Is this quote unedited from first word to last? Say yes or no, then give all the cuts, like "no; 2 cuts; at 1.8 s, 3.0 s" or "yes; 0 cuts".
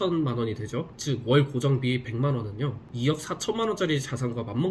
yes; 0 cuts